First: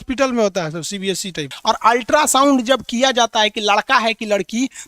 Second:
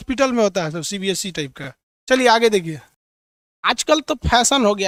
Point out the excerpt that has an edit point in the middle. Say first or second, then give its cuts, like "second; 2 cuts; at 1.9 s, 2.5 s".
first; 1 cut; at 1.5 s